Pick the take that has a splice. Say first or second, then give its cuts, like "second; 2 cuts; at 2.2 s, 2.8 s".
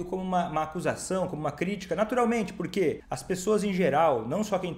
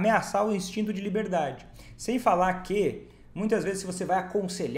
first; 1 cut; at 3.1 s